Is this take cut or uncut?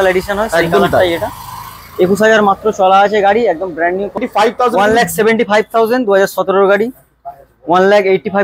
cut